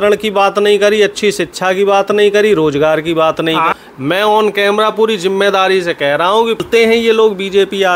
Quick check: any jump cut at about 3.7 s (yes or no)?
yes